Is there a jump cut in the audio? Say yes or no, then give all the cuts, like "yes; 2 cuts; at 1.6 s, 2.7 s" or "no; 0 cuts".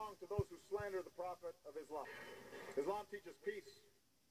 yes; 1 cut; at 2.1 s